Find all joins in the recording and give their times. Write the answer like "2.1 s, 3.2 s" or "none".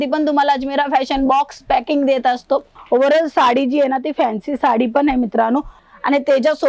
2.7 s, 5.8 s